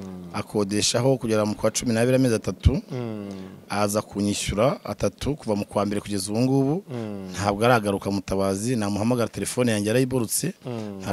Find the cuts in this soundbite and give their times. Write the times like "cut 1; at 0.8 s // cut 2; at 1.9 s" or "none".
none